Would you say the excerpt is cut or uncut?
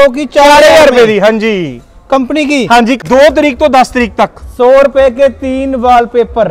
cut